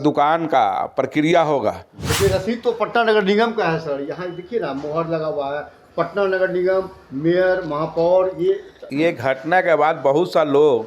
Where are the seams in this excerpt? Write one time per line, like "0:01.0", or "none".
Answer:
0:02.1
0:08.8